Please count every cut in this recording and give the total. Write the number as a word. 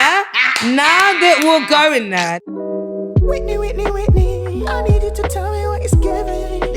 one